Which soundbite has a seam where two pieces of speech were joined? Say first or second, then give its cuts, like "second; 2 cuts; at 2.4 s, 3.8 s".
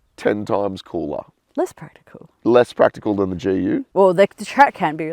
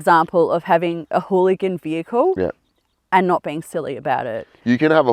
first; 1 cut; at 3.9 s